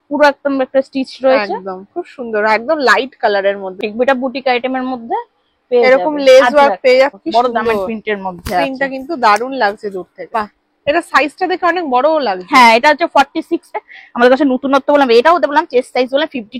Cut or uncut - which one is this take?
cut